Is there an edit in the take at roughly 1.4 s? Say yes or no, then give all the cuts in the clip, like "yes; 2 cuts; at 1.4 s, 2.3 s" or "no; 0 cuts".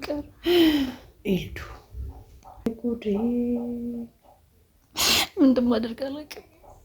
no; 1 cut; at 2.7 s